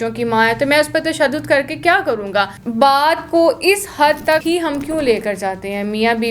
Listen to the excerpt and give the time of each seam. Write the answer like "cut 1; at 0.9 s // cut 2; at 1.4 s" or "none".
cut 1; at 2.6 s // cut 2; at 4.4 s